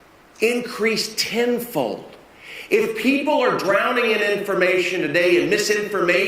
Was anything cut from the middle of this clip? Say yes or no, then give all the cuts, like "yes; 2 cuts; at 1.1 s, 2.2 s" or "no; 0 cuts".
no; 0 cuts